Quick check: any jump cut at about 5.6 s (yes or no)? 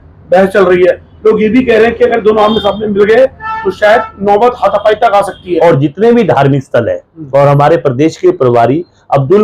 yes